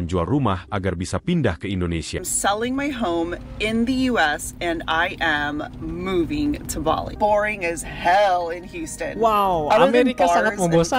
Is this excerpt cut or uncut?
cut